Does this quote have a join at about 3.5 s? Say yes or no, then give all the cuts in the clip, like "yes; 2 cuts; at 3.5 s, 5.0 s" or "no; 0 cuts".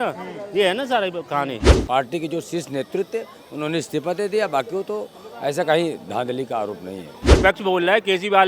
no; 2 cuts; at 1.7 s, 7.2 s